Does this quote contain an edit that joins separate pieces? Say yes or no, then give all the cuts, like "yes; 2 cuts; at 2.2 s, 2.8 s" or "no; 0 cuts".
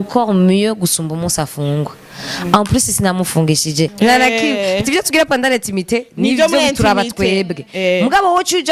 yes; 1 cut; at 3.9 s